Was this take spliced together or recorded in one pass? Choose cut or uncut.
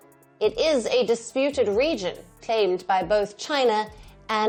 uncut